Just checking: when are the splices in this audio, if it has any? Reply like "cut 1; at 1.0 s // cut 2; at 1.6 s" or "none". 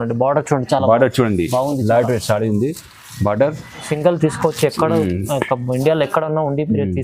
cut 1; at 3.9 s